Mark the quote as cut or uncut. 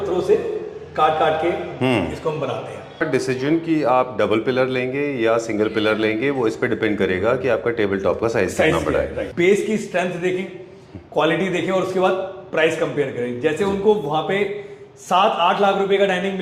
cut